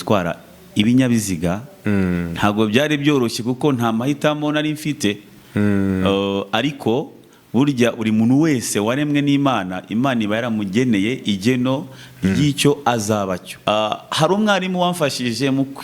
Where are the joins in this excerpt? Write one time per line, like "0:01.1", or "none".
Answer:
0:13.5